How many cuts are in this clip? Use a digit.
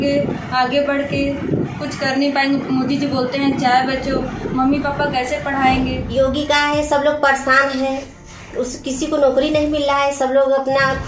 1